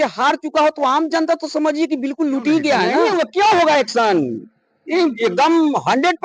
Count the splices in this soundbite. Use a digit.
1